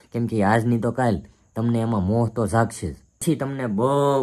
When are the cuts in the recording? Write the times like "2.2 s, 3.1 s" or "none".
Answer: 3.2 s